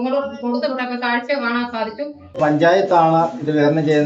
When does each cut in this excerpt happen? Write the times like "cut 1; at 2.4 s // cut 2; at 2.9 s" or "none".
cut 1; at 2.4 s